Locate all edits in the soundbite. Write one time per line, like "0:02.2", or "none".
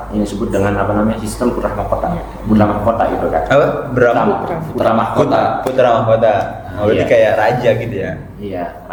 none